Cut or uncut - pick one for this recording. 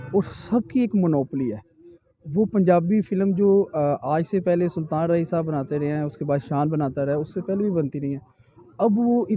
uncut